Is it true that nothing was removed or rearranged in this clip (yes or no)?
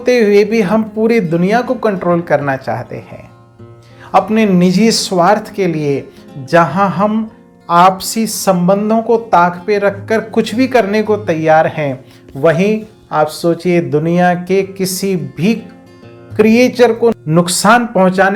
yes